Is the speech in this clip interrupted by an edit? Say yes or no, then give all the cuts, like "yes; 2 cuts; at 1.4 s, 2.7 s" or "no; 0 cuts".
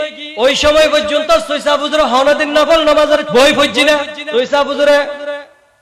yes; 2 cuts; at 3.3 s, 4.2 s